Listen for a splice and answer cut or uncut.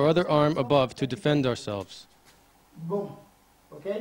uncut